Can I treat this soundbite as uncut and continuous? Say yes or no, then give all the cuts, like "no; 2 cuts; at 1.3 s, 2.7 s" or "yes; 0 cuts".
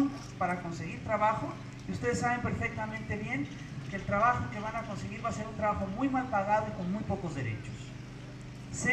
yes; 0 cuts